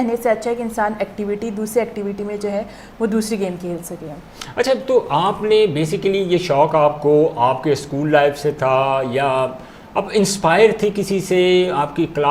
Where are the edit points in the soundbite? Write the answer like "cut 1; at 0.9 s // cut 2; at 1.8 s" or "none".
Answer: none